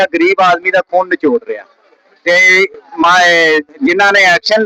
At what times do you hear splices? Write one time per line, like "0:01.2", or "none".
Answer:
none

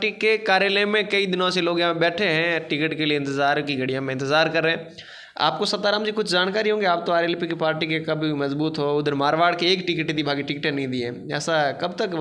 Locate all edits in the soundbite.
none

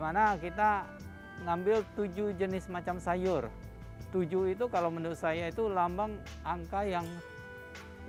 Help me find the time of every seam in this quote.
none

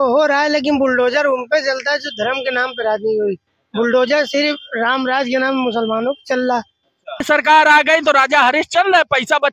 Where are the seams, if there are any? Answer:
0:07.2

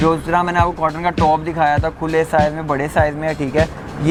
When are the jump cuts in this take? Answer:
none

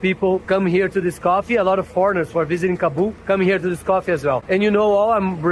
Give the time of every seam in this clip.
none

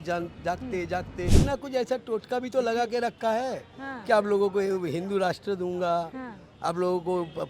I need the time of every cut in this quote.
0:01.4

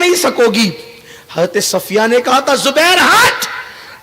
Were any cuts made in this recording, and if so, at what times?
0:03.1

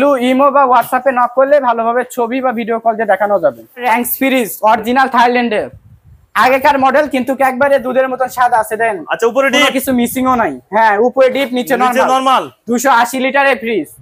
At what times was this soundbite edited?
0:03.8

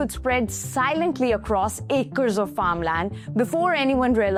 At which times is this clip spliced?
none

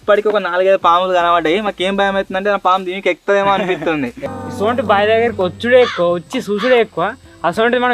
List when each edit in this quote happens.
0:04.2

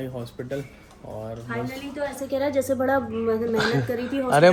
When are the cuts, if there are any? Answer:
none

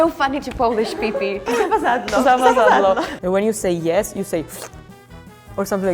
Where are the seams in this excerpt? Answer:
0:03.1

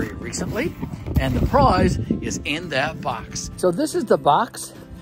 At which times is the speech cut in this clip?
0:03.6

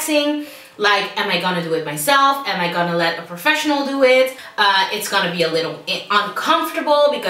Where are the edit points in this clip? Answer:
0:04.4

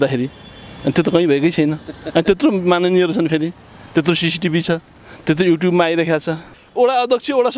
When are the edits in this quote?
0:06.6

